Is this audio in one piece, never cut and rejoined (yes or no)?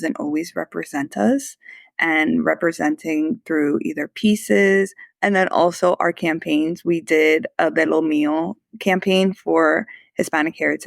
no